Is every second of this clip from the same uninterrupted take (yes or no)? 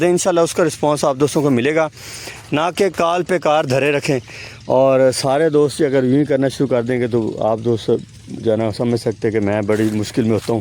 yes